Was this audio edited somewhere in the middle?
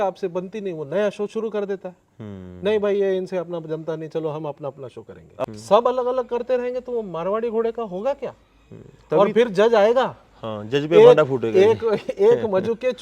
yes; 1 cut; at 5.4 s

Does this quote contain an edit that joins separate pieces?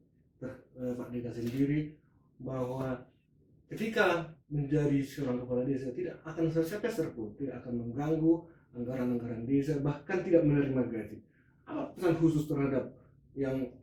no; 0 cuts

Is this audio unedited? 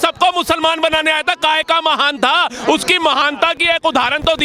yes; 0 cuts

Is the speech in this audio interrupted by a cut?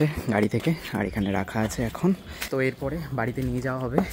no; 0 cuts

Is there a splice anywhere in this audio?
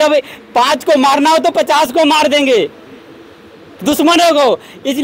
no; 0 cuts

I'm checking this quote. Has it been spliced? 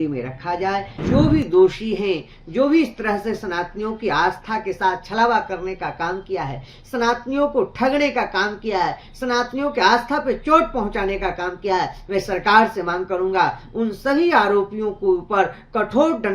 yes; 1 cut; at 0.9 s

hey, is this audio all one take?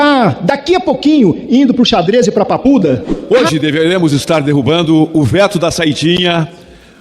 no; 1 cut; at 3.1 s

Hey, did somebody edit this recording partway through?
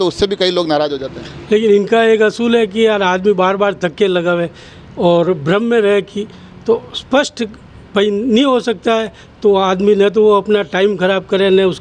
no; 0 cuts

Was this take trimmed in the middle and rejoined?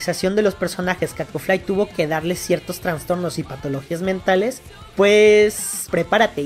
no; 0 cuts

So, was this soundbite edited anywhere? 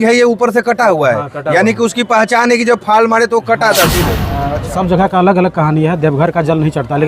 yes; 1 cut; at 4.5 s

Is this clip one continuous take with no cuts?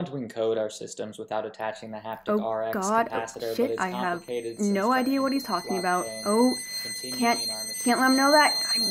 yes; 0 cuts

